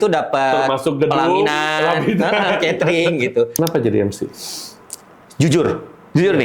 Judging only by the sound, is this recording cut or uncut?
cut